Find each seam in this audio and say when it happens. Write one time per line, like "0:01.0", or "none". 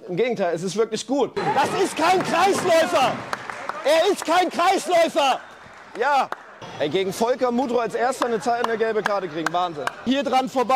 0:01.4
0:06.7
0:10.1